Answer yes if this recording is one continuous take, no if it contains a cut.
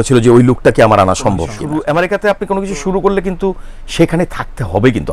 no